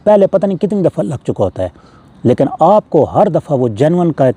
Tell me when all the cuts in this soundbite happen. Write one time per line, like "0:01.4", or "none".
none